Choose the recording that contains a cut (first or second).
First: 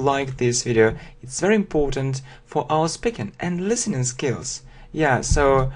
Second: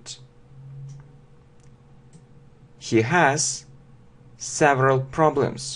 second